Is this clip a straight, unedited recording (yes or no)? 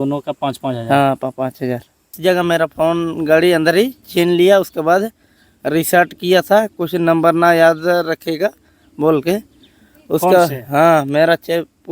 no